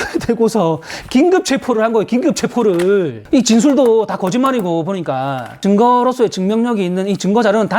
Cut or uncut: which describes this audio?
cut